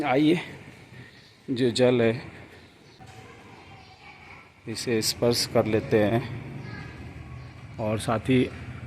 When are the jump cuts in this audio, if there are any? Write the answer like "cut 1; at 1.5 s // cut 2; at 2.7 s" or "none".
cut 1; at 3.0 s